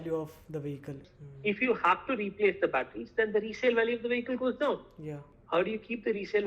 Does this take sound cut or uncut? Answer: cut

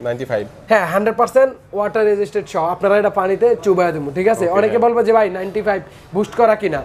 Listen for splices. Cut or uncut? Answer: uncut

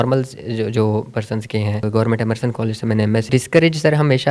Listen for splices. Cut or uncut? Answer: cut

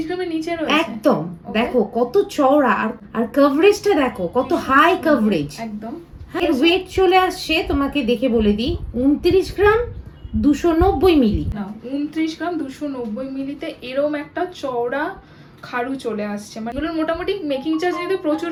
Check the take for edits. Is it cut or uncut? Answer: uncut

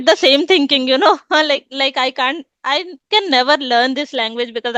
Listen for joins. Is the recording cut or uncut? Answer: uncut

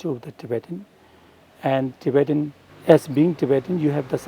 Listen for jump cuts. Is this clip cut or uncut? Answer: cut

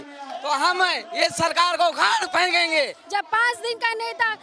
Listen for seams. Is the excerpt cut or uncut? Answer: cut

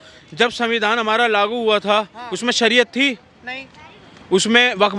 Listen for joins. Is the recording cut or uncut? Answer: uncut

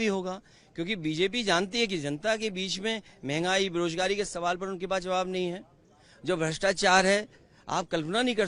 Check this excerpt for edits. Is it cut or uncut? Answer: uncut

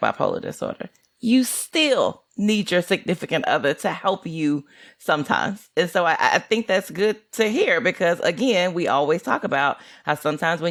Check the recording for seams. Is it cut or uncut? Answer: uncut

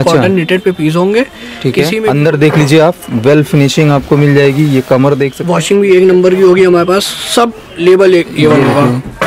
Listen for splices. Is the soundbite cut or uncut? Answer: cut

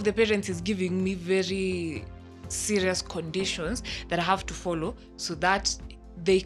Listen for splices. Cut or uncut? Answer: uncut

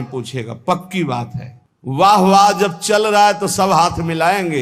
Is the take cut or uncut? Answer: uncut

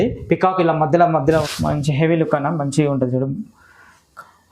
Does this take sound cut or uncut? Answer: cut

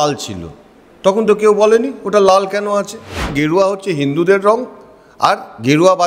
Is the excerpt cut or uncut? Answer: cut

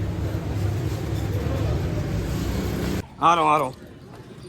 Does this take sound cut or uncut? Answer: cut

